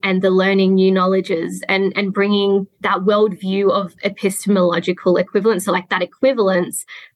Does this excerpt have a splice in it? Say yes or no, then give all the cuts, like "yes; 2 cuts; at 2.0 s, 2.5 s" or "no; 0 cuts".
no; 0 cuts